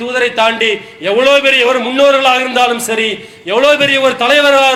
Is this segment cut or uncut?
uncut